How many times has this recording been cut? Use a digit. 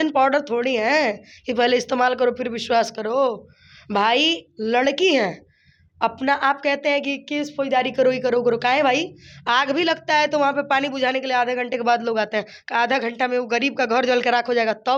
0